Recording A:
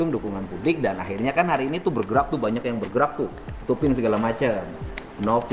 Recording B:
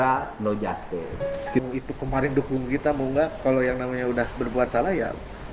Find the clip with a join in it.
B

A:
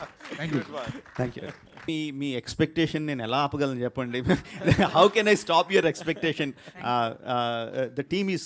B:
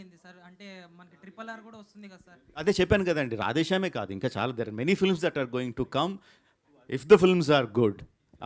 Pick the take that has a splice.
A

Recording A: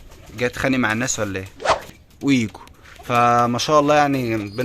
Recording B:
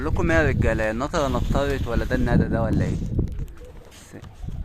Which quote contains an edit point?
A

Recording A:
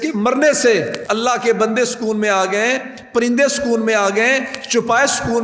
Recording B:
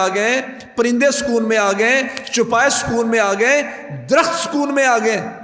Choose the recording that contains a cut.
A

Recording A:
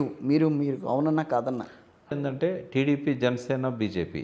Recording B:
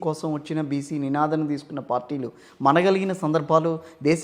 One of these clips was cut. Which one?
A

